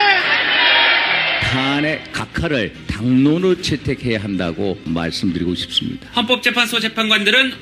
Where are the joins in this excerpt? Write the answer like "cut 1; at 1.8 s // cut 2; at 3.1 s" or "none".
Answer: none